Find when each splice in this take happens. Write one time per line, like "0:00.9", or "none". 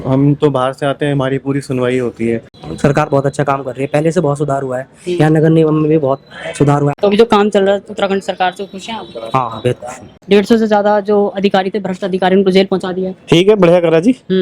0:02.5
0:06.9
0:10.2